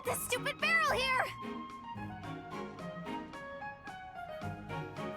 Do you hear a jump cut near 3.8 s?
no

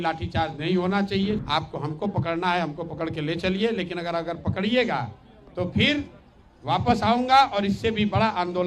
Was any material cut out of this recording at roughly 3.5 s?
no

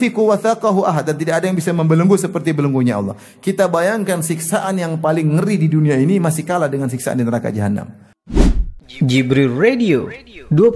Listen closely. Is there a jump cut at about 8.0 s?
yes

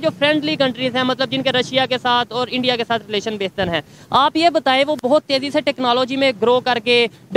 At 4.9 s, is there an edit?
no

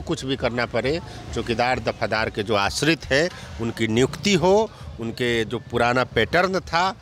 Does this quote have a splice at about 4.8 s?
no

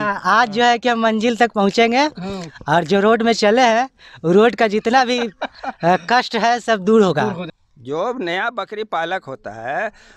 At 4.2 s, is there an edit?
no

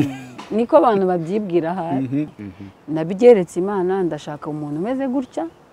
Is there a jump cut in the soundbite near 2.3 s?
yes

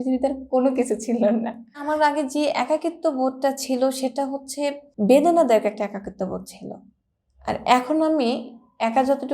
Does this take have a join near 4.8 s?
yes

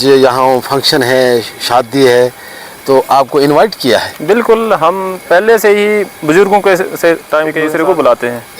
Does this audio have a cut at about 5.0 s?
no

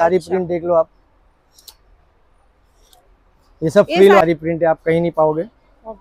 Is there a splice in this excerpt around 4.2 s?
yes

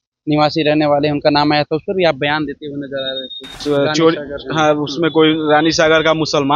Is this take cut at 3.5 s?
yes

